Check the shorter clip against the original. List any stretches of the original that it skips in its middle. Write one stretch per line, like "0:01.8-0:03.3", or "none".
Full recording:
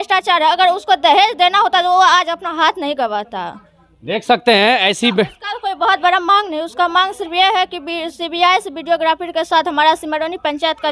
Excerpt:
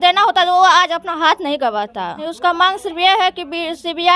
0:03.6-0:06.6